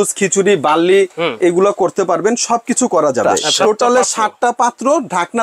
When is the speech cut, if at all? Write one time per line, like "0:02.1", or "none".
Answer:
0:03.4